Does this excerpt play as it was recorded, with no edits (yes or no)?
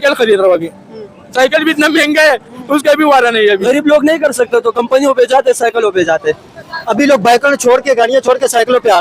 no